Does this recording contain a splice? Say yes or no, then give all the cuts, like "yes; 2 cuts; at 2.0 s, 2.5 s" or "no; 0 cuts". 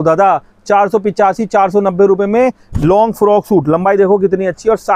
no; 0 cuts